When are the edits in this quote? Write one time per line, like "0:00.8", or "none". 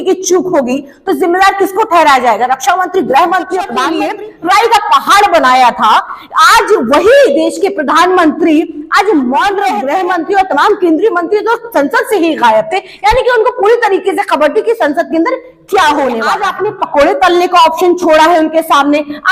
0:03.9
0:09.7
0:16.5

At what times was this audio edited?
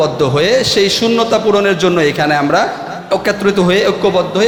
none

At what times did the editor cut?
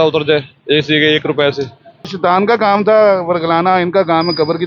0:02.1

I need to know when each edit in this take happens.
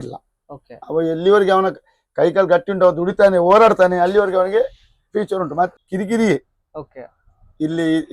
0:05.7

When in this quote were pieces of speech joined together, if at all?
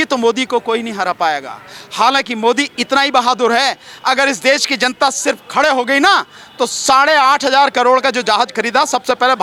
none

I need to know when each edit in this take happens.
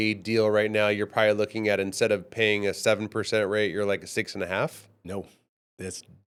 none

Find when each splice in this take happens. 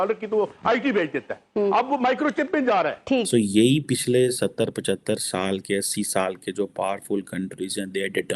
0:03.3

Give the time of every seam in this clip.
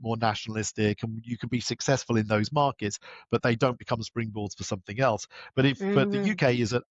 none

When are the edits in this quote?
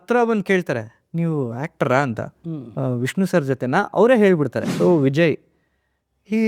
0:04.6

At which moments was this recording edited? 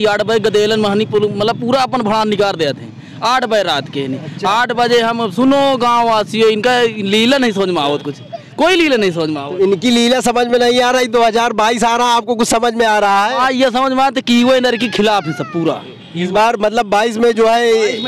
none

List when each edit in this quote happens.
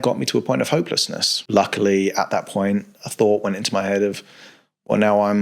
0:01.4

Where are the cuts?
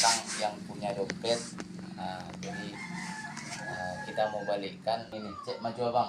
0:05.2

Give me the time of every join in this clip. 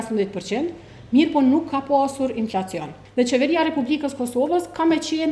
0:03.0

